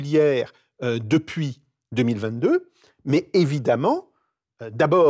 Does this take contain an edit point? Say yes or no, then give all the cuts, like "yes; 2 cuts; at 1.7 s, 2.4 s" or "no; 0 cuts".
no; 0 cuts